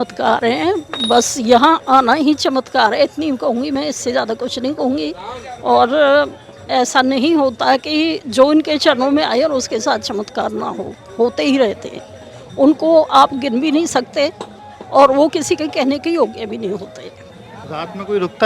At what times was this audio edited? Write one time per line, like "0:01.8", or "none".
none